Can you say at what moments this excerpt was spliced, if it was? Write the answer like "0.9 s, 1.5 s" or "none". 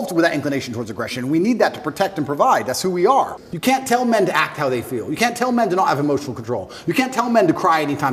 3.4 s

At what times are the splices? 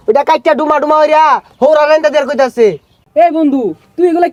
none

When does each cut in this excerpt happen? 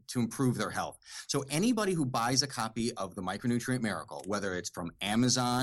none

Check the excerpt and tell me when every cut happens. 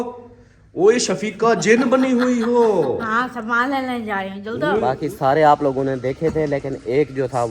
4.8 s

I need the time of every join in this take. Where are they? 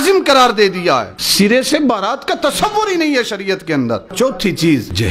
1.2 s, 4.1 s

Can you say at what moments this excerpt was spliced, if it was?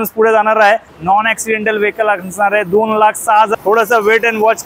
0.9 s, 3.5 s

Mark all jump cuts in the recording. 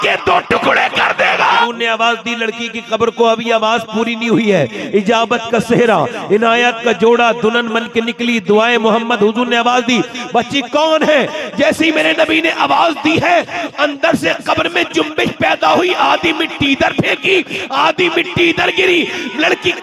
1.7 s

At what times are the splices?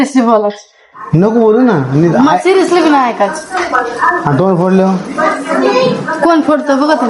none

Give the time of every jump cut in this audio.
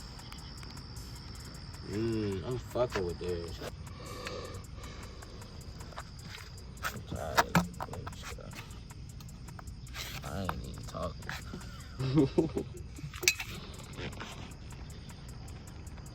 3.8 s

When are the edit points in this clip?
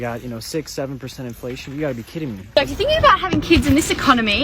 2.4 s

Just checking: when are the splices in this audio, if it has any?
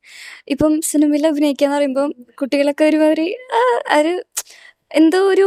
none

